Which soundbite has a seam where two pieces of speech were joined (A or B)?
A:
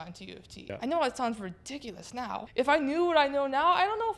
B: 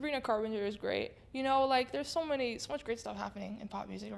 A